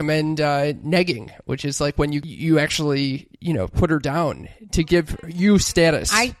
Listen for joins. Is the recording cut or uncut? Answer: cut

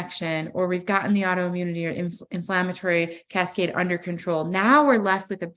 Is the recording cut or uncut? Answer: uncut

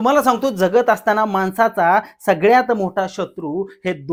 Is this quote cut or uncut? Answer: uncut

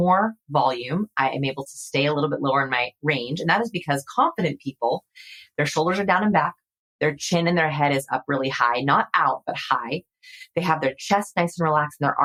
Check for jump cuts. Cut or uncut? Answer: uncut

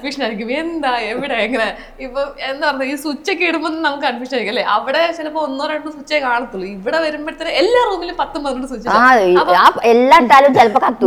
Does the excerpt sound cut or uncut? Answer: uncut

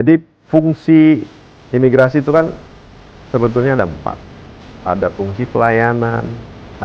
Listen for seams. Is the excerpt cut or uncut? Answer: uncut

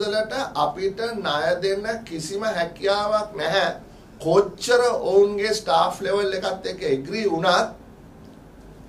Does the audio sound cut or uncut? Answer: uncut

